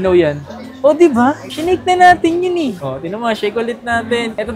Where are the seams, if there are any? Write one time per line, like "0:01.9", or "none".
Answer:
none